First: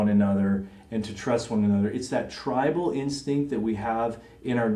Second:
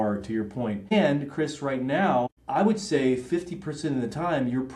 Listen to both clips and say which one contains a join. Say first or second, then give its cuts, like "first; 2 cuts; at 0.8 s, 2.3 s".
second; 2 cuts; at 0.9 s, 2.4 s